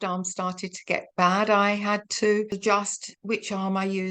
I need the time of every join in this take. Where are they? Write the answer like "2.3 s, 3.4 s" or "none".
2.5 s